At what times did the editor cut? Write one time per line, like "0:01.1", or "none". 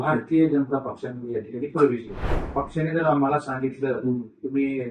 0:02.3